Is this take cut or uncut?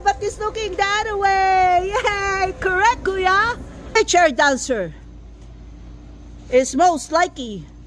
cut